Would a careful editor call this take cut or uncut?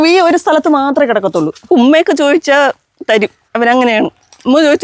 cut